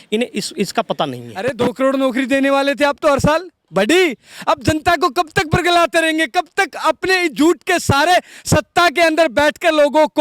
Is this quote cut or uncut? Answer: cut